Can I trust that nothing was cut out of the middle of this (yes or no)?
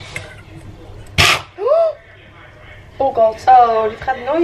no